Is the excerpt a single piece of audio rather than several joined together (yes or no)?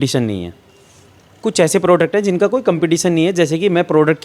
yes